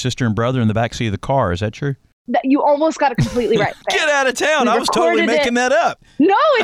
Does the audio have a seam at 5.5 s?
no; 2 cuts; at 2.1 s, 3.8 s

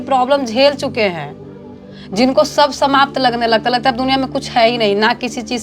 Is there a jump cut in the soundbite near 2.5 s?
no; 0 cuts

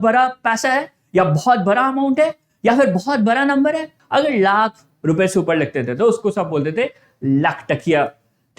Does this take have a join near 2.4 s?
no; 1 cut; at 3.9 s

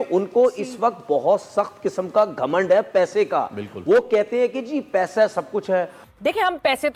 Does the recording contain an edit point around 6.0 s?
yes; 1 cut; at 6.0 s

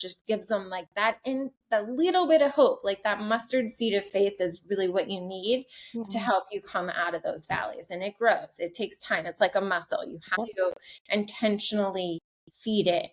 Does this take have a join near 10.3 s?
yes; 1 cut; at 10.3 s

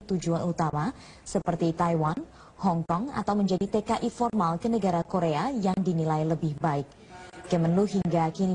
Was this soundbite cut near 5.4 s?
yes; 1 cut; at 5.4 s

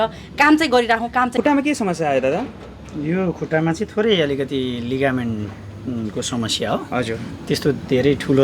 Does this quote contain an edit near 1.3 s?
yes; 1 cut; at 1.3 s

